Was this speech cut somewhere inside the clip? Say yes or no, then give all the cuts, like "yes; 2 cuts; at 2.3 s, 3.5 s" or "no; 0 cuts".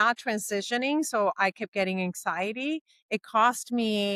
no; 0 cuts